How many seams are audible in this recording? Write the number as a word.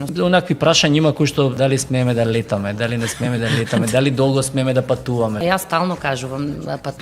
two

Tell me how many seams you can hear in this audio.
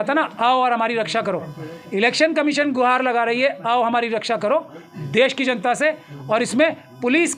zero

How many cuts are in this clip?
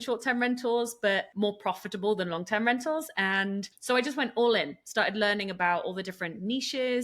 two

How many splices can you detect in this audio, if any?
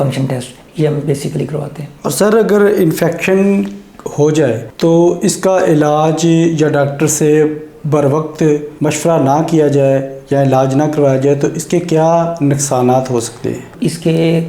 zero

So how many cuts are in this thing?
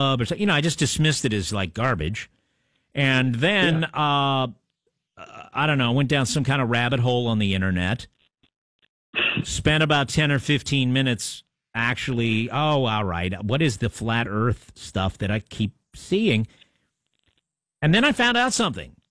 one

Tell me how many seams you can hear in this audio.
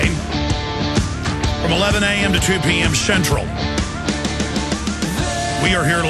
one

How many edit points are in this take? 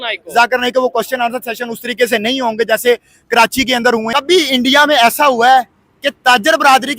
one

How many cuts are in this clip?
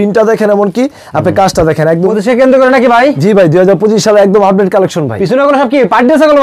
one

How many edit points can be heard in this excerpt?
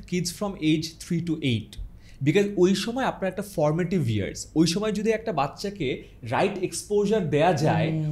zero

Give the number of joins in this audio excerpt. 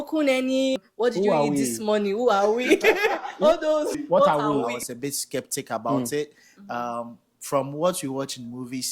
three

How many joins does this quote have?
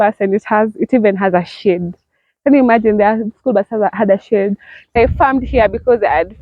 one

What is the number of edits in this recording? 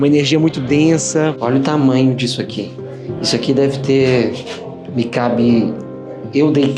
one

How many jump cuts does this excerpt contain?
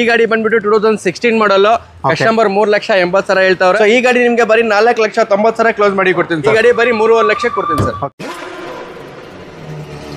three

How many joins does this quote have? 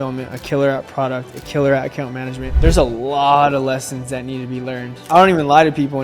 two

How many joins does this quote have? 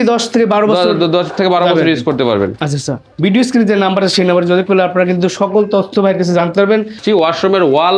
two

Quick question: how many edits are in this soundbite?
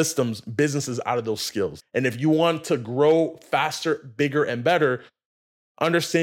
one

